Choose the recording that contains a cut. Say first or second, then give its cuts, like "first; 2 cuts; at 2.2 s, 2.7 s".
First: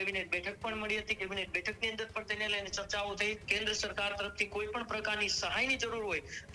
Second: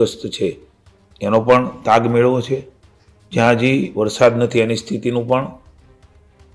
first; 1 cut; at 3.4 s